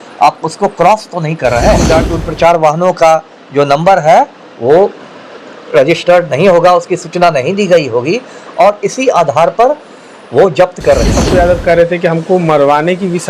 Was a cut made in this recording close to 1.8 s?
yes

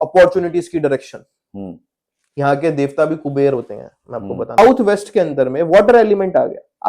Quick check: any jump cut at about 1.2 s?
no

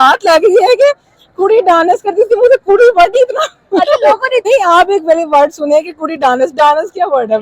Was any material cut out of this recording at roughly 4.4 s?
yes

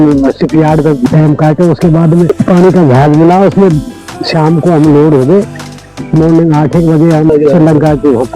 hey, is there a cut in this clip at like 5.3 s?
no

